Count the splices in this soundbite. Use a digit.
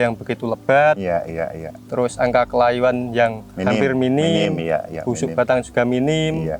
0